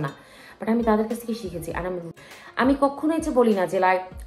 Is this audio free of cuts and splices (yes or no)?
no